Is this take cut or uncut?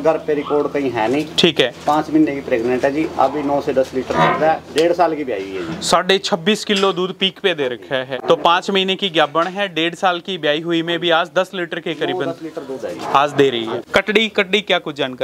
cut